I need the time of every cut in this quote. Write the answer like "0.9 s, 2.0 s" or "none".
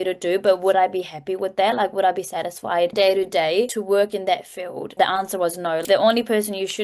2.9 s, 3.8 s, 4.9 s, 5.8 s